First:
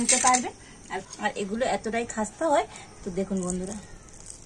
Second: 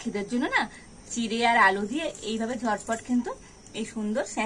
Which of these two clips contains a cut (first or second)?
first